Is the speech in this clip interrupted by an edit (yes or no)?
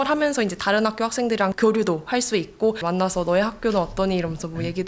yes